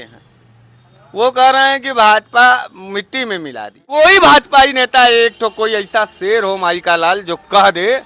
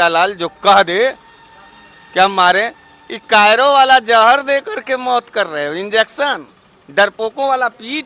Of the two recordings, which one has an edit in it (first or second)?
first